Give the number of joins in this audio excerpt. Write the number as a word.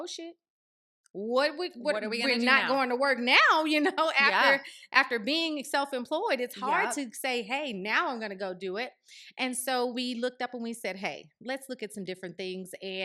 zero